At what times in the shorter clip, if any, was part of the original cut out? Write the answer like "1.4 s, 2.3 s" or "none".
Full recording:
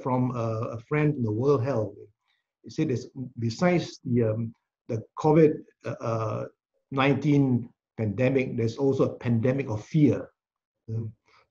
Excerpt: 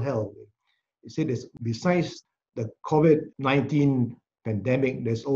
1.5 s, 2.2 s, 3.3 s